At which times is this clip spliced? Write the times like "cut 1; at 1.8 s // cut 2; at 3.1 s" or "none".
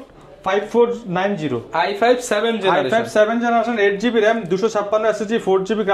none

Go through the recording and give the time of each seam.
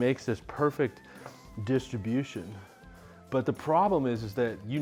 none

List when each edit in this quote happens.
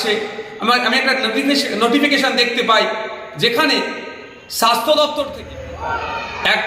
cut 1; at 5.3 s

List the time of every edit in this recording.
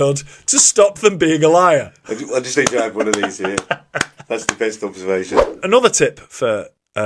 cut 1; at 5.4 s

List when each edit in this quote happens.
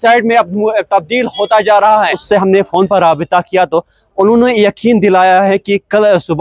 cut 1; at 2.2 s

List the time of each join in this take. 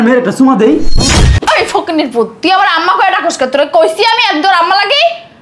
cut 1; at 1.0 s

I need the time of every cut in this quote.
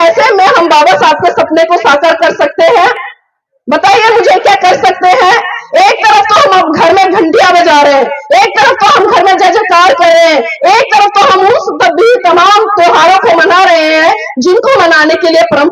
none

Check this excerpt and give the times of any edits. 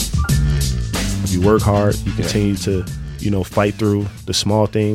cut 1; at 1.1 s

